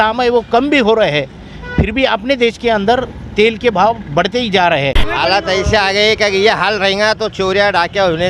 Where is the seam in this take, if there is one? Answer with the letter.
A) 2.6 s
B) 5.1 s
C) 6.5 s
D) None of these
B